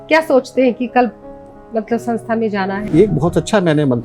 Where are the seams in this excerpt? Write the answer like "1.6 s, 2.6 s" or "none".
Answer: 2.8 s